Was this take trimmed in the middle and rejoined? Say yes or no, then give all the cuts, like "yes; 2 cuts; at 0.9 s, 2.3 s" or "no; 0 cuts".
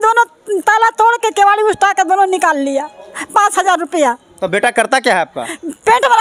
no; 0 cuts